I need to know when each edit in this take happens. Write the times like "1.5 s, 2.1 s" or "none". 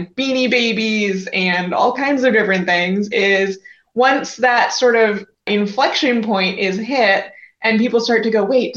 5.5 s